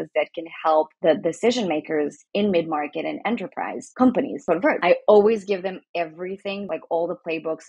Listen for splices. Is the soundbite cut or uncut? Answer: cut